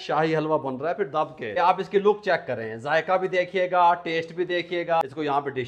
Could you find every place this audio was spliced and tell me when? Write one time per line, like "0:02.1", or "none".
0:01.6
0:05.0